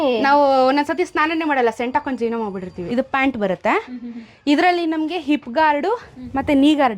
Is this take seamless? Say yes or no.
no